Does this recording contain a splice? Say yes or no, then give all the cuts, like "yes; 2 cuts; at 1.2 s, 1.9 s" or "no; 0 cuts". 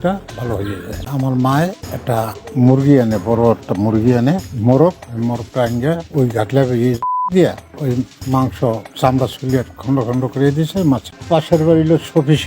yes; 2 cuts; at 1.1 s, 11.1 s